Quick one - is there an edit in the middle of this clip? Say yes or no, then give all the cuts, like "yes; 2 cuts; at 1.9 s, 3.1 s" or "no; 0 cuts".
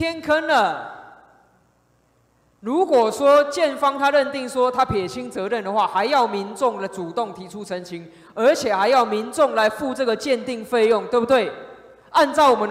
no; 0 cuts